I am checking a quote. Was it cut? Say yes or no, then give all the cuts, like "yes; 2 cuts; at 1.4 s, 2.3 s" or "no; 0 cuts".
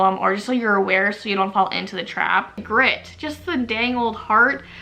yes; 1 cut; at 2.6 s